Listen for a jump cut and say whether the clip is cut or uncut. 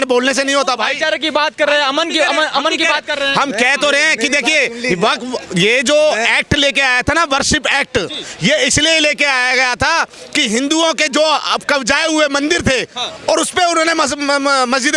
uncut